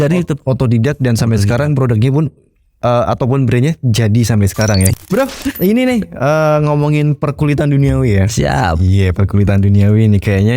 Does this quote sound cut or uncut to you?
cut